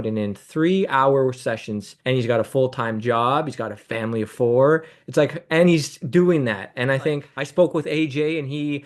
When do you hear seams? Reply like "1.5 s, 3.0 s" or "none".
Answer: 7.3 s